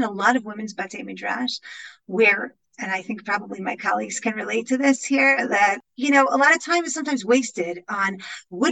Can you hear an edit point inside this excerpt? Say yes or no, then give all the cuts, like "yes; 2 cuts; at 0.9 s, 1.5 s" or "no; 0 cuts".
yes; 1 cut; at 5.8 s